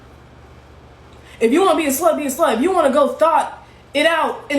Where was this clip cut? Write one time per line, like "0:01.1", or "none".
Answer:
0:02.7